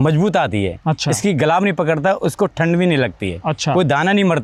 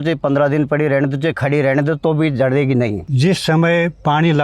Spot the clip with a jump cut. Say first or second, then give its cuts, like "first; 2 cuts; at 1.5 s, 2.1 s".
second; 1 cut; at 3.1 s